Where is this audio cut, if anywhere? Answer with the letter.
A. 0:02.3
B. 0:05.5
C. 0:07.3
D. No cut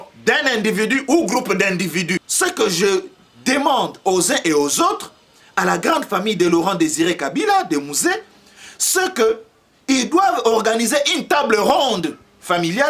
A